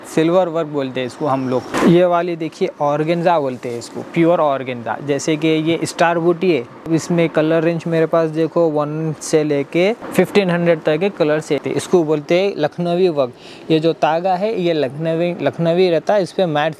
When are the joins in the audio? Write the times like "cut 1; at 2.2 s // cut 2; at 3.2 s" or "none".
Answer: cut 1; at 1.7 s // cut 2; at 6.9 s // cut 3; at 10.0 s // cut 4; at 11.6 s